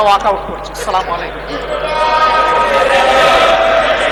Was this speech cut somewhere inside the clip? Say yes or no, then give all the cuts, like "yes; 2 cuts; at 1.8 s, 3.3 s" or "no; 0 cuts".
no; 0 cuts